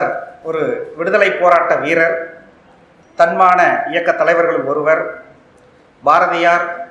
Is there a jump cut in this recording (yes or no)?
no